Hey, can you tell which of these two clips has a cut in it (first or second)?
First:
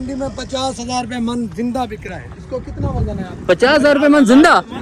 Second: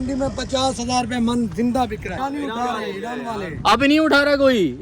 second